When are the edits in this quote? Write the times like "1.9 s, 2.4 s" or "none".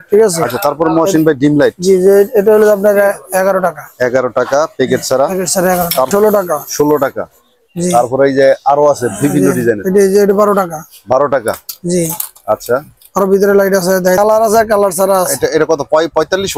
6.1 s, 14.2 s

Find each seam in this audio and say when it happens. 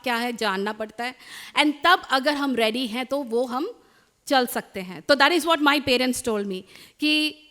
none

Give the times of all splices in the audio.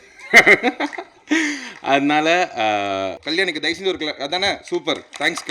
3.2 s

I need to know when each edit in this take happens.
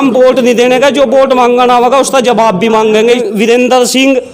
3.2 s

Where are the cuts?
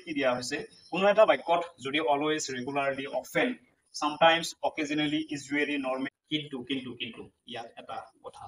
6.1 s

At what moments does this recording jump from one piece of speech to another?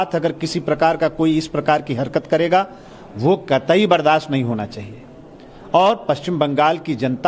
2.5 s

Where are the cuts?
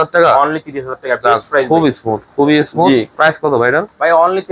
1.7 s

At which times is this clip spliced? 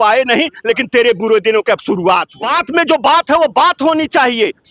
2.4 s

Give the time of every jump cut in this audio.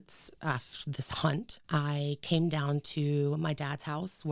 1.6 s

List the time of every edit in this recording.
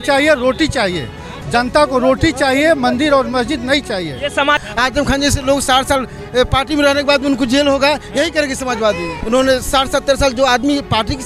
4.6 s, 9.2 s

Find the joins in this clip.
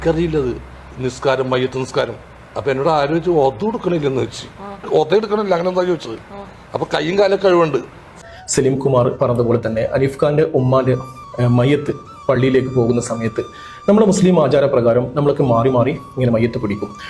8.0 s

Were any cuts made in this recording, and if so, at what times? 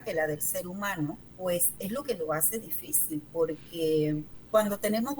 1.3 s, 4.3 s

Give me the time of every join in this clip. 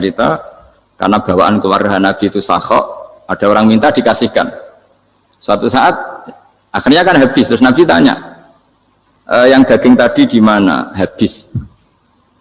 none

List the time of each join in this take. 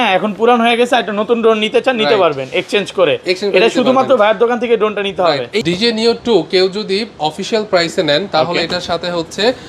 5.6 s

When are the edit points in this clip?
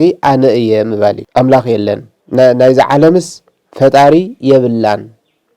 1.2 s, 2.1 s

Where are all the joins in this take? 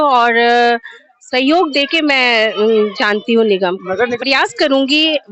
4.1 s

